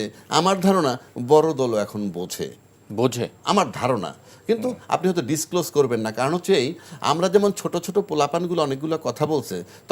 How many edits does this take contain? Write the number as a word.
zero